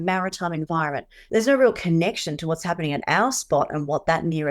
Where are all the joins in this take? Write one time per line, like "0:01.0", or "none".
0:01.1